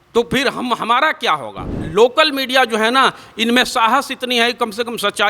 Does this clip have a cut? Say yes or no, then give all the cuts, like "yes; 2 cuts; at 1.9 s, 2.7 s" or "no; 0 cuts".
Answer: yes; 1 cut; at 1.7 s